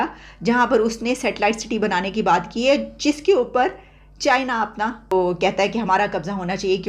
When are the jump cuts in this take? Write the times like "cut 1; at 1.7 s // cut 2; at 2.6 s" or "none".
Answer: cut 1; at 5.1 s